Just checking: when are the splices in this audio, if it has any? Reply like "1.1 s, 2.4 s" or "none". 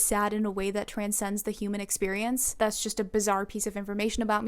2.5 s